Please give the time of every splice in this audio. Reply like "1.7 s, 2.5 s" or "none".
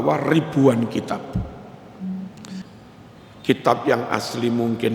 2.6 s